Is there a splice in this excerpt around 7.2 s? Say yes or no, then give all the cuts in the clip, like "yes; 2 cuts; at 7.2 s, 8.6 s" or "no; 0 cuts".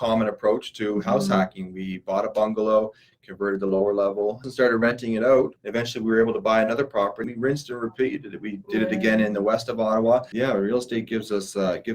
yes; 4 cuts; at 4.5 s, 5.6 s, 7.2 s, 10.3 s